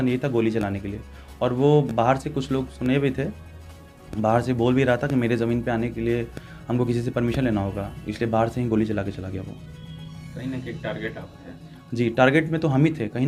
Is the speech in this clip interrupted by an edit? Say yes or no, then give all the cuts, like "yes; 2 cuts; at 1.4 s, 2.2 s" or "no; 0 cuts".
no; 0 cuts